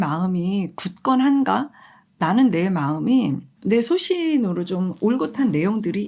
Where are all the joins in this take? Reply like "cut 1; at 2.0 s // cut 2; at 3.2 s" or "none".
none